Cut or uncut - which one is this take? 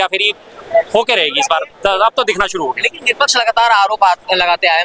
uncut